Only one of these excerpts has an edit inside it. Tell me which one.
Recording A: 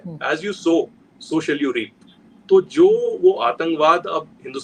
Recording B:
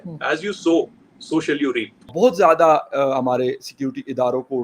B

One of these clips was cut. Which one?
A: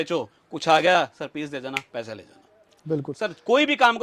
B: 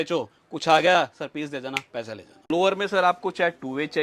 B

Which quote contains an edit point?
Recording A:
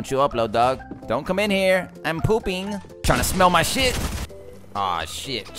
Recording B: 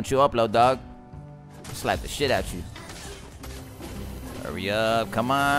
A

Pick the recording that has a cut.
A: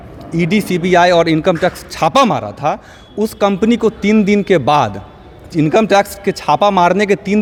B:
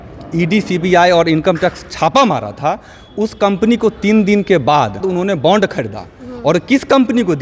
B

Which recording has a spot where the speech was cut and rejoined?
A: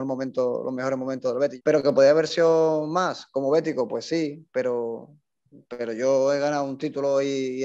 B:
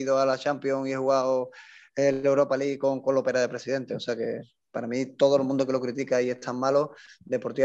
A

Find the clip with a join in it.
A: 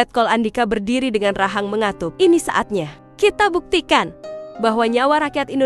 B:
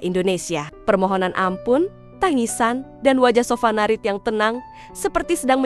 A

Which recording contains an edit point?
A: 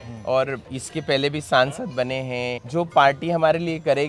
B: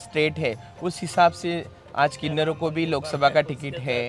A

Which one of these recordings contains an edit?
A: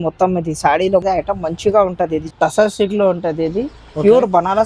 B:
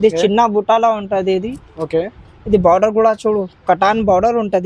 A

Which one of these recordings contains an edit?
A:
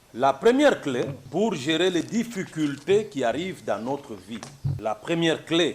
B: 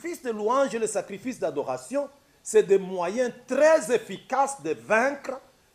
A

